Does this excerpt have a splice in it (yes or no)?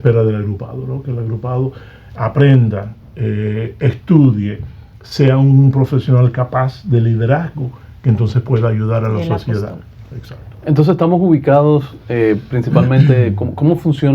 no